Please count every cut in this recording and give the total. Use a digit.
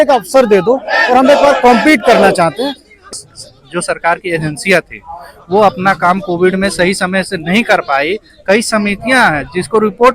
1